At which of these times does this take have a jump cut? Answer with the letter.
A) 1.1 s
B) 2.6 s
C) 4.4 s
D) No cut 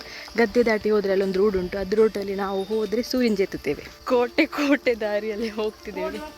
C